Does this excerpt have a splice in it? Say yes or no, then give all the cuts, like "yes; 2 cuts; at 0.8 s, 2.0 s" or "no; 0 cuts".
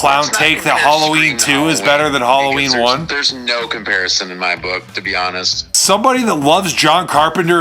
yes; 1 cut; at 5.7 s